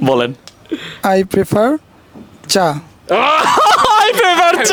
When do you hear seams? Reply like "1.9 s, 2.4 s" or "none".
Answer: none